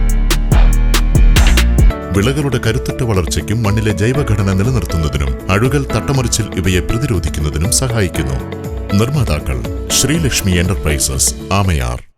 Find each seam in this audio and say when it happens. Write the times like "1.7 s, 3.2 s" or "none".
1.9 s